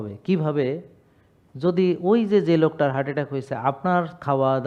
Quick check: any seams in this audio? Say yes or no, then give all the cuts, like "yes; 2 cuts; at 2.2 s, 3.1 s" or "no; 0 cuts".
no; 0 cuts